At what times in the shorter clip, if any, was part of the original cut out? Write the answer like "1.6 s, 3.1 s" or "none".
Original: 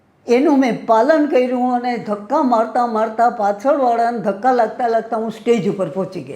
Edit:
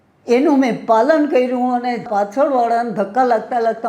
2.1 s